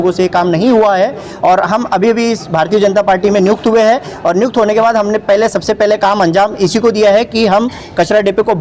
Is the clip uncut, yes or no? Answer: yes